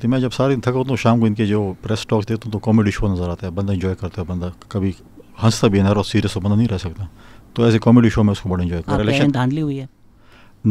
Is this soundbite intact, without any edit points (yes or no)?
no